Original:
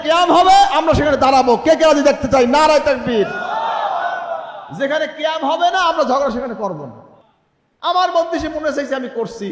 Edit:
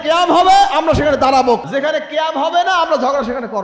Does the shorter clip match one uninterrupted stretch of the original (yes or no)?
no